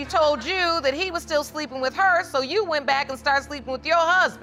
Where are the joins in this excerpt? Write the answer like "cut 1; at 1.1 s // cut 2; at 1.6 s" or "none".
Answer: none